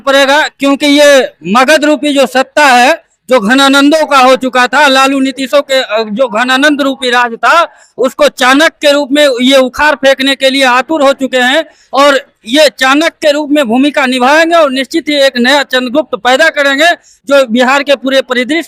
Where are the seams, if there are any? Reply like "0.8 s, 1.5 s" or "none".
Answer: none